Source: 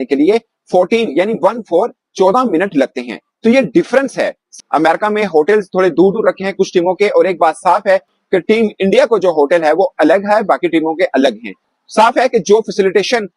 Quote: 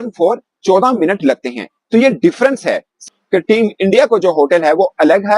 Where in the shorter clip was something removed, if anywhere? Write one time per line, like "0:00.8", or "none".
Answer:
0:03.1